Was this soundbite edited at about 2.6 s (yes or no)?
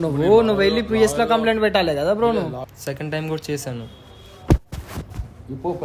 yes